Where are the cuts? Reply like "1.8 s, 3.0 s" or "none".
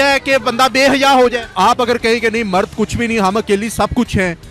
1.5 s